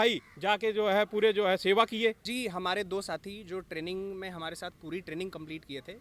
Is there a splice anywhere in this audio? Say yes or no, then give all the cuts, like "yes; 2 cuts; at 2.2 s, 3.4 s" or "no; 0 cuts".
yes; 1 cut; at 2.2 s